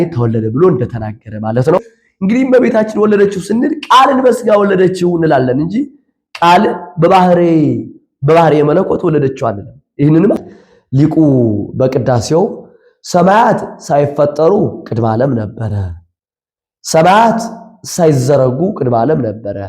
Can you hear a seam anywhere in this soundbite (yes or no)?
yes